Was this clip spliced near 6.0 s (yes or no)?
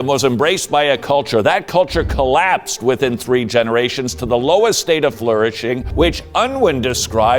no